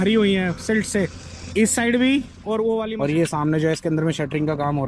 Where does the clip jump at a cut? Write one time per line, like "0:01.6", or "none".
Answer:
0:02.9